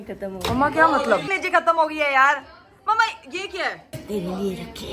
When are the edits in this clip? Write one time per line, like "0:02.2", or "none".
none

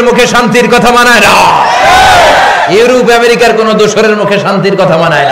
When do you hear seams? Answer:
none

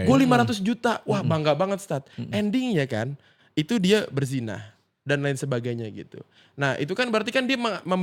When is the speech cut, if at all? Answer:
none

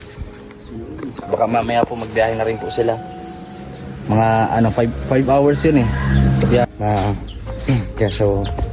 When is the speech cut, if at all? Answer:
0:06.7

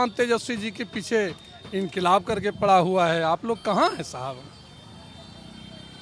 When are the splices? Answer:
none

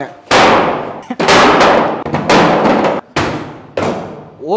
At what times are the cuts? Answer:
0:01.0
0:02.0
0:03.0

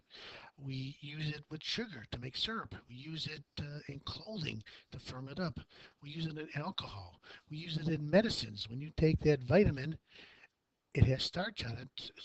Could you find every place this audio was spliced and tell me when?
0:09.2

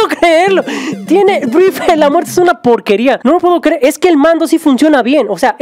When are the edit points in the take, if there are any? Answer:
0:03.4

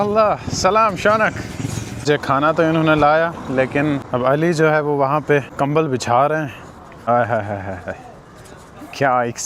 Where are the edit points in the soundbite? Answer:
0:01.9
0:04.0
0:05.5
0:07.1

